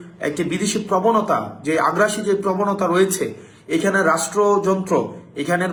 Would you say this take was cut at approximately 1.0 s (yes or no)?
no